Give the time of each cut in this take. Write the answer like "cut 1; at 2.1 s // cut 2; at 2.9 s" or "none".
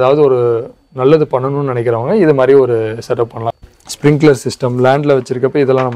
cut 1; at 3.4 s